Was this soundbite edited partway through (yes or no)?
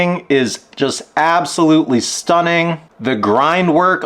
yes